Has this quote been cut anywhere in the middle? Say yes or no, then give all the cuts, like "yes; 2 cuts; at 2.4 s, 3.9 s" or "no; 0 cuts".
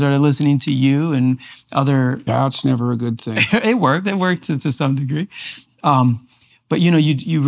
no; 0 cuts